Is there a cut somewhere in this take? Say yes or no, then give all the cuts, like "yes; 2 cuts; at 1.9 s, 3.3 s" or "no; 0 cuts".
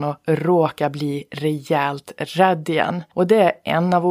yes; 1 cut; at 3.0 s